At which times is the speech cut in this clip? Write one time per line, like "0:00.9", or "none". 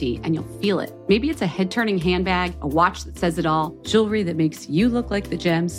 none